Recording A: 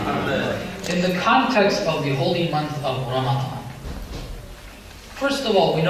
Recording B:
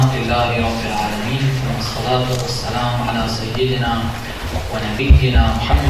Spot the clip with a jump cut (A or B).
A